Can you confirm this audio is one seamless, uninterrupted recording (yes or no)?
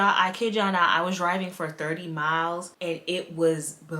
no